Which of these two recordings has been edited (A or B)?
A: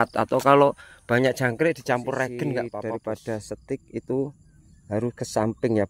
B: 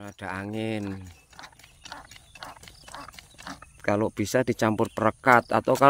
A